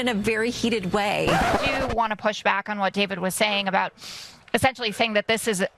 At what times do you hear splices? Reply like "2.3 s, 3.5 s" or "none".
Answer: 1.6 s